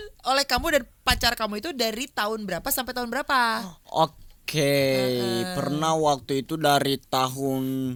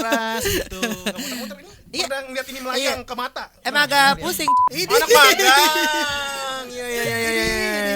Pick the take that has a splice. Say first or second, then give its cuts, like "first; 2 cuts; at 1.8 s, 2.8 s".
second; 1 cut; at 4.5 s